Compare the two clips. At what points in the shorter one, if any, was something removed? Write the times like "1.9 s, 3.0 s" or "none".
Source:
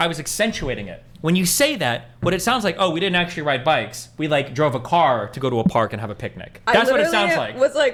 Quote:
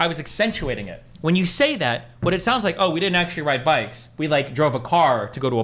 none